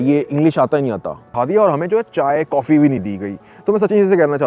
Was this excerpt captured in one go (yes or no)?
no